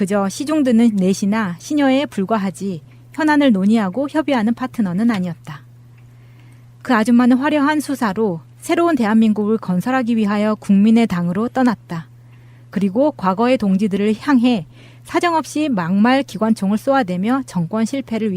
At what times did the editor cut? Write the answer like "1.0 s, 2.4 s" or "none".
1.8 s